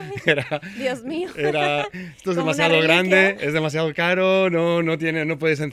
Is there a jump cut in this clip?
no; 0 cuts

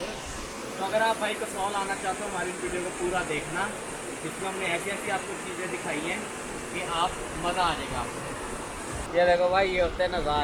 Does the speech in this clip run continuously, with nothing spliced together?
no; 1 cut; at 9.0 s

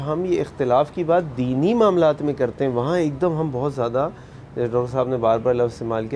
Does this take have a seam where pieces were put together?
no; 0 cuts

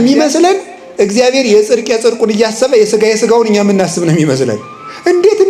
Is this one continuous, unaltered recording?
yes; 0 cuts

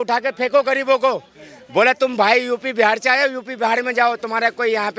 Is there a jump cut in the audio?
no; 0 cuts

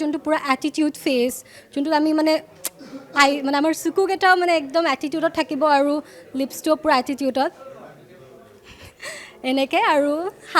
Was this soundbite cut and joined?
no; 0 cuts

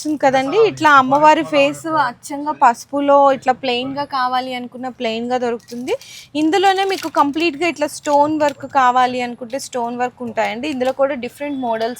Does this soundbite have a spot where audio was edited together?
no; 0 cuts

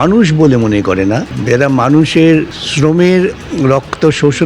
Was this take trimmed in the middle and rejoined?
yes; 2 cuts; at 1.3 s, 2.6 s

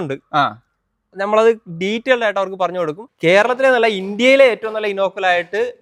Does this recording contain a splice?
yes; 1 cut; at 3.0 s

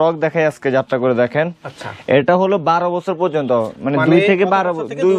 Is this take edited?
no; 0 cuts

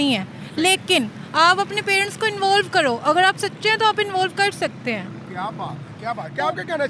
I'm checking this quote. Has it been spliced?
no; 0 cuts

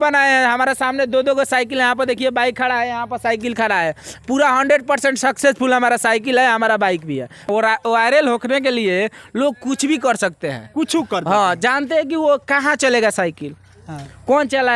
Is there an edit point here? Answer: yes; 1 cut; at 7.5 s

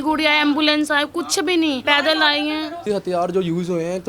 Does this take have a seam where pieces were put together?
yes; 2 cuts; at 1.8 s, 2.8 s

